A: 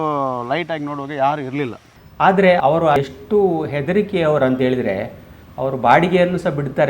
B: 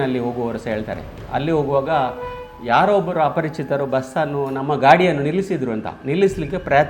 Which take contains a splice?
A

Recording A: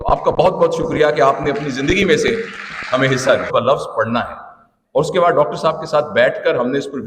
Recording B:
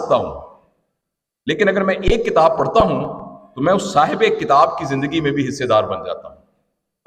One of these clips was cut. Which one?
A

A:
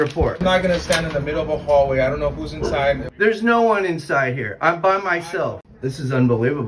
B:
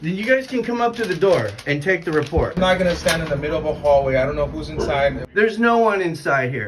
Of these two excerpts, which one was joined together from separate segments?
A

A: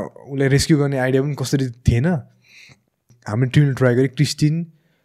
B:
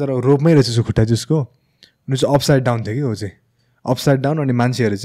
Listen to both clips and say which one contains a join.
A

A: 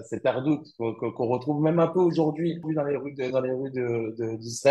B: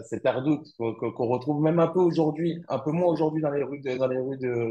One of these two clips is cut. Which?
A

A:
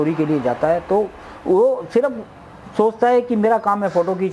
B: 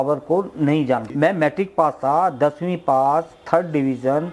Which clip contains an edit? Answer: B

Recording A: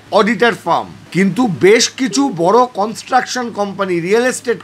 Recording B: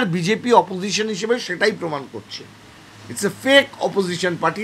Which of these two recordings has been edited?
A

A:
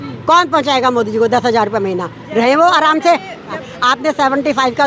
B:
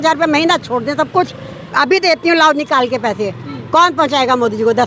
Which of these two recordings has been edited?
A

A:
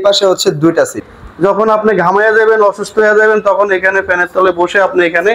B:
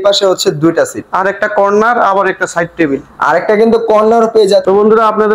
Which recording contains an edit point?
A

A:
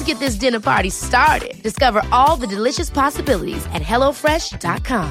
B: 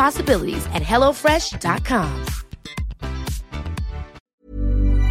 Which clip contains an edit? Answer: B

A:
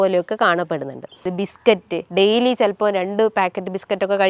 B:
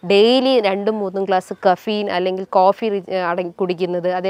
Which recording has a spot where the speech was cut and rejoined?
A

